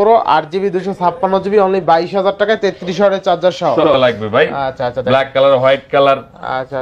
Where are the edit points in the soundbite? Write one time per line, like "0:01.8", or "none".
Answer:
0:03.8